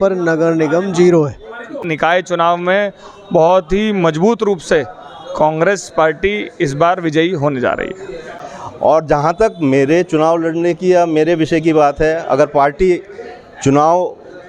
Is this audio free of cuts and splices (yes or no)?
no